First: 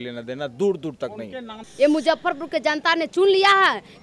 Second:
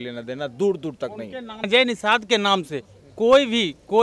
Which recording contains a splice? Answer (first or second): first